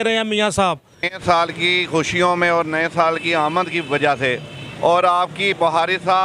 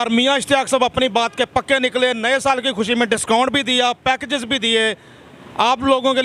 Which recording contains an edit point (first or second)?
first